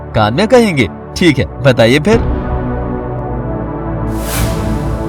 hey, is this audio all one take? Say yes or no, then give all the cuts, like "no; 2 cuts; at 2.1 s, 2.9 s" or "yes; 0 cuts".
no; 1 cut; at 2.2 s